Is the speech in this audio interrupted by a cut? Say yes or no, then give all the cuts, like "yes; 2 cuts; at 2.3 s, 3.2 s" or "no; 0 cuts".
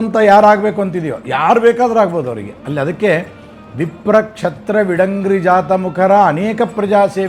no; 0 cuts